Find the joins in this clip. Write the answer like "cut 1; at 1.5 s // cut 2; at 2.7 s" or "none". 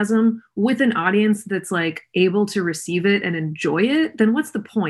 none